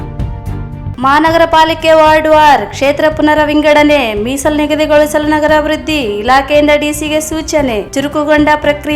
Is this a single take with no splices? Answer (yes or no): no